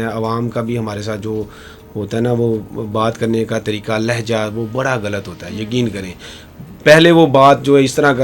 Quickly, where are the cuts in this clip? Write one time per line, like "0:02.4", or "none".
none